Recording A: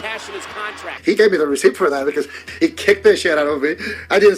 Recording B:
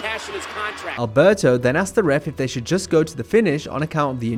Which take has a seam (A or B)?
A